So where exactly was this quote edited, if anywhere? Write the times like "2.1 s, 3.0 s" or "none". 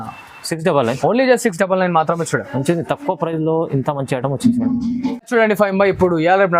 5.2 s